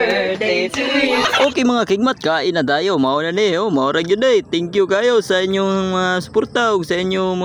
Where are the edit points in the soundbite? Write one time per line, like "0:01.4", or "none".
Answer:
0:01.2